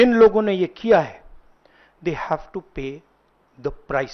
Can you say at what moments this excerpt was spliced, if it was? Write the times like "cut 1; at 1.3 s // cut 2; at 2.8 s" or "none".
none